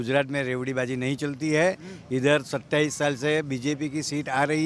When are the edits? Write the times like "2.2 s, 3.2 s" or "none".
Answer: none